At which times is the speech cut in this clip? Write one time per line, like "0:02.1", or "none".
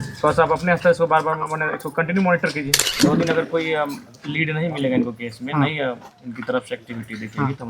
0:02.8